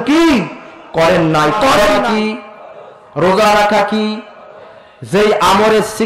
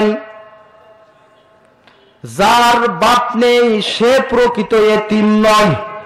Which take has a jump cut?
first; 1 cut; at 1.9 s

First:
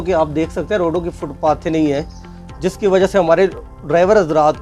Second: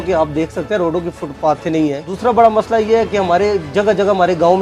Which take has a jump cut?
second; 1 cut; at 2.1 s

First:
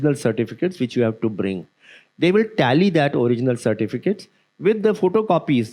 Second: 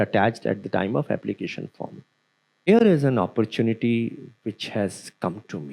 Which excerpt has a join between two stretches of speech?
second; 1 cut; at 2.7 s

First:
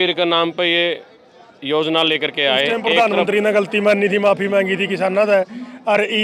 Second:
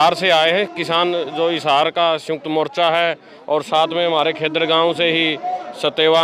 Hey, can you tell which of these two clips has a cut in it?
first; 1 cut; at 2.8 s

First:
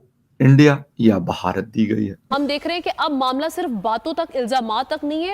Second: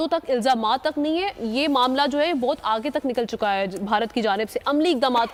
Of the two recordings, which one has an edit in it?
first; 1 cut; at 2.2 s

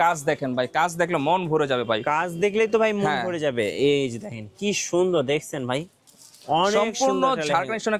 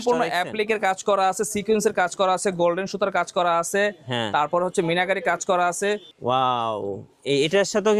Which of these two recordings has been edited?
second; 1 cut; at 6.1 s

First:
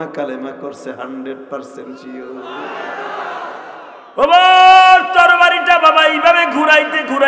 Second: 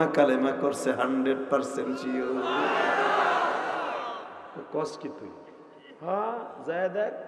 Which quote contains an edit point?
first; 1 cut; at 3.9 s

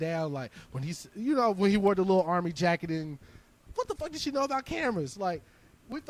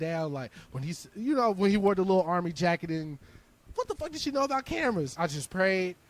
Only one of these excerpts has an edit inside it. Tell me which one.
second; 1 cut; at 5.1 s

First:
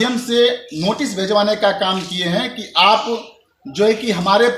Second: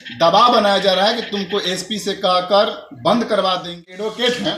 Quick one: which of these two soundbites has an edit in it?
second; 1 cut; at 3.7 s

